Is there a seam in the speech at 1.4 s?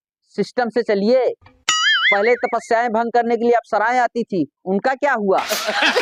no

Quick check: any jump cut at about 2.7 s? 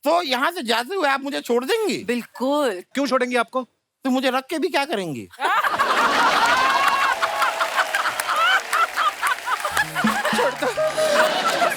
no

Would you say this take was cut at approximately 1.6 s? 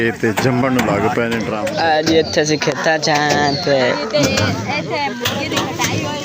yes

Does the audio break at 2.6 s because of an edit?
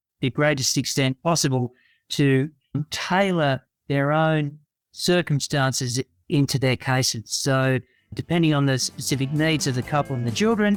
no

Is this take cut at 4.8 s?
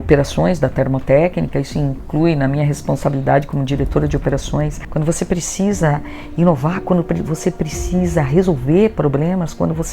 yes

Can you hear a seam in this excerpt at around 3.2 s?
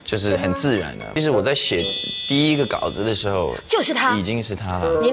no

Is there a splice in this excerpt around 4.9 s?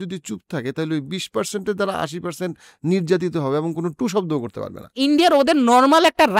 yes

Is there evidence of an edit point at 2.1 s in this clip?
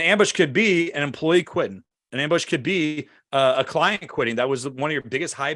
no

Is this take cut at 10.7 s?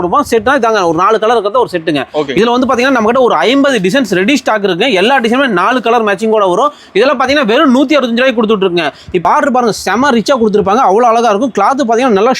no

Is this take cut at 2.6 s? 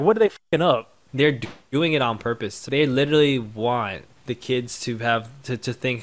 yes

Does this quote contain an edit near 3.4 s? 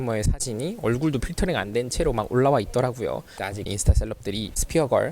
yes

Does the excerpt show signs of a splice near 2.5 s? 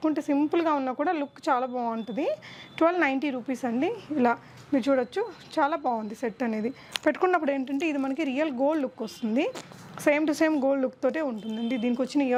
no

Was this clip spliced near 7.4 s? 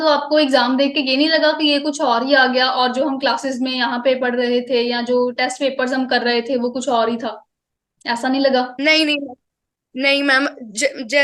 no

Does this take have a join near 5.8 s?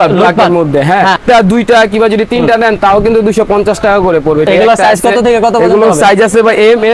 no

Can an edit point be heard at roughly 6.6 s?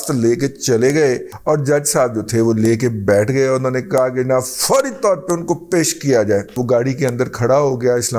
yes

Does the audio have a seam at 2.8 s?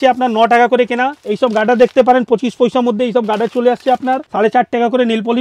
no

